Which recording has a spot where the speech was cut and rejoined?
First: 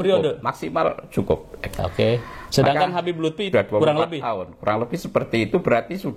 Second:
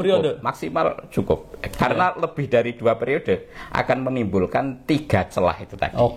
first; 2 cuts; at 1.8 s, 3.5 s

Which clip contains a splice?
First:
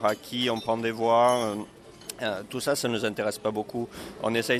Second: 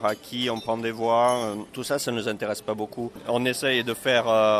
second; 2 cuts; at 1.7 s, 3.2 s

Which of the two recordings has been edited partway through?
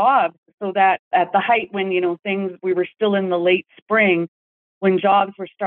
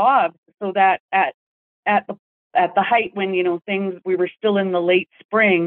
first; 1 cut; at 1.0 s

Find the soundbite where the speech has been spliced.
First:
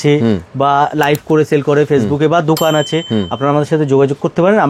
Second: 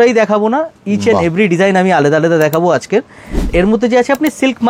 second; 1 cut; at 3.5 s

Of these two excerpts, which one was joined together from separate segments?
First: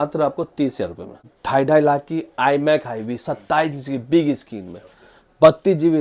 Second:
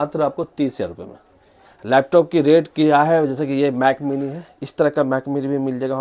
first; 1 cut; at 1.3 s

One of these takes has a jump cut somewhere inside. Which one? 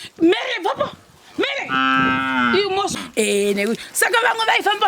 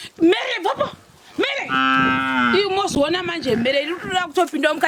first; 1 cut; at 2.9 s

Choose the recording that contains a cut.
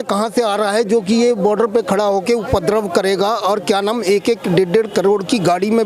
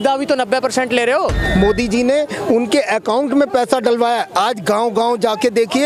second; 1 cut; at 1.4 s

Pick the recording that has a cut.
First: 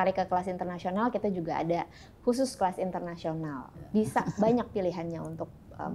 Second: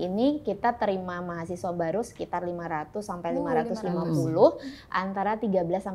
first; 1 cut; at 3.5 s

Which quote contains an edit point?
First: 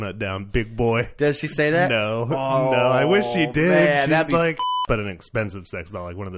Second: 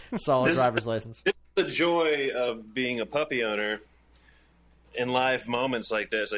first; 1 cut; at 4.8 s

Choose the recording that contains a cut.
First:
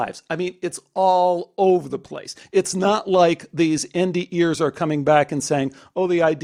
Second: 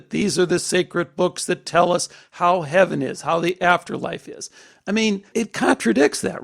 second; 1 cut; at 5.3 s

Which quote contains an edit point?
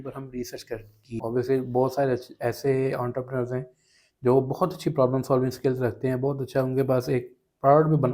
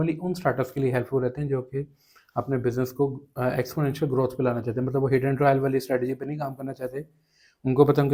first; 1 cut; at 1.2 s

